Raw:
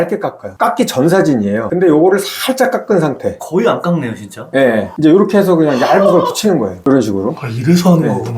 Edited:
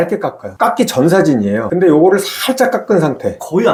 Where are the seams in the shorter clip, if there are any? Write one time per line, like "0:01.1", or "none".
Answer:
none